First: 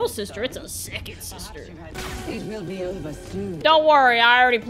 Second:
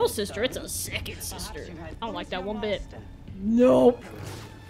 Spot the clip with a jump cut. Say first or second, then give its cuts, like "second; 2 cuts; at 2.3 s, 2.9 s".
first; 1 cut; at 1.9 s